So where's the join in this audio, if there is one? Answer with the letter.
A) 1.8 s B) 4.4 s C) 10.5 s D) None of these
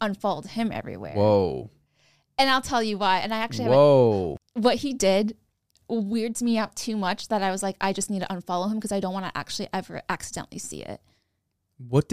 B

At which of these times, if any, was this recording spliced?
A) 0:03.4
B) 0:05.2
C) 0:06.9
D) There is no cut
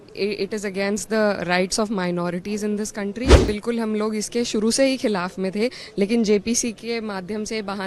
A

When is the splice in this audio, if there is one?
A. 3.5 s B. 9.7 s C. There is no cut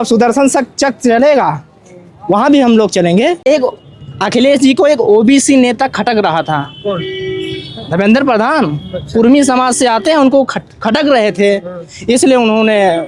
A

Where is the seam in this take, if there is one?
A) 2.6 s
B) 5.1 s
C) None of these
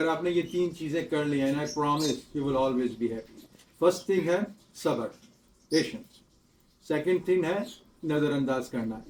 C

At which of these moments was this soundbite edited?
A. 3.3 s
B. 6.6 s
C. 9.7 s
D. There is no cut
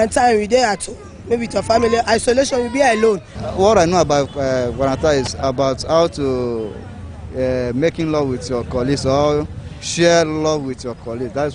A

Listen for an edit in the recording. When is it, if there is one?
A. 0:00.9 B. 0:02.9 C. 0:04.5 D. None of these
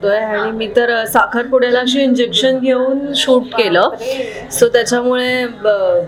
D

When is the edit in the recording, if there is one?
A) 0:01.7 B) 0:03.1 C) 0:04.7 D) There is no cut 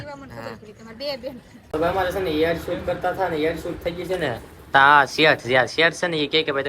A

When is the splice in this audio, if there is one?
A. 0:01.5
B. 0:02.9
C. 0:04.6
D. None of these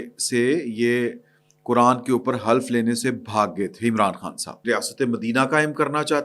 C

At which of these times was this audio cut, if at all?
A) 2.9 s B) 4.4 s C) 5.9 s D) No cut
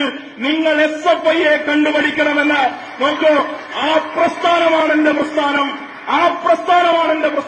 D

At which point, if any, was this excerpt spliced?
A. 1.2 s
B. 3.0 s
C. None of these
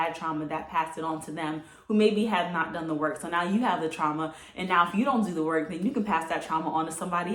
C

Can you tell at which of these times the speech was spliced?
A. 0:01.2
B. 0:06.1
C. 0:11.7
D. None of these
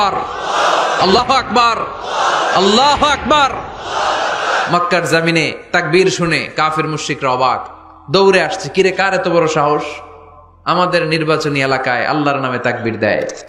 A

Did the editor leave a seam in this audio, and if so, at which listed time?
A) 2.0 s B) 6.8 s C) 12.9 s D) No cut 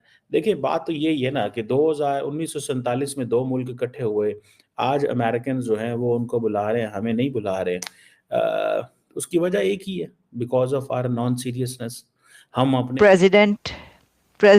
C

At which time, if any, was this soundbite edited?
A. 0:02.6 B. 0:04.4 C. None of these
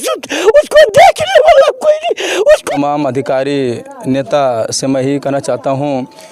A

